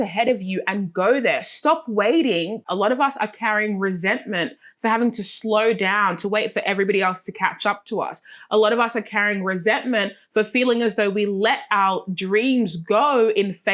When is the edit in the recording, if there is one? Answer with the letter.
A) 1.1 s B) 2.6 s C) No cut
B